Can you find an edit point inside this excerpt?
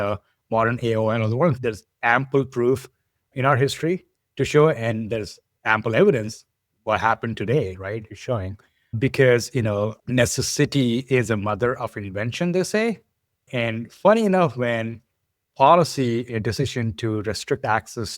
yes; 2 cuts; at 1.6 s, 3.2 s

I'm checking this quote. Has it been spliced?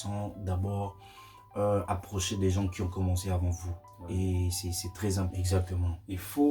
yes; 1 cut; at 5.4 s

